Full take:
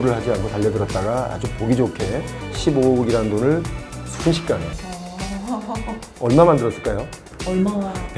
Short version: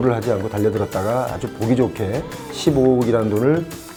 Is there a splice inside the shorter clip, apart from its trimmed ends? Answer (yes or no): no